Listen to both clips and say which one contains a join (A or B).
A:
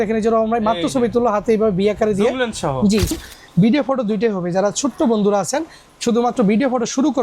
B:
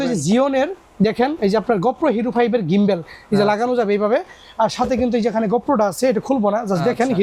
A